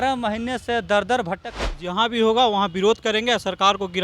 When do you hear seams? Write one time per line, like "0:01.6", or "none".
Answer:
0:01.5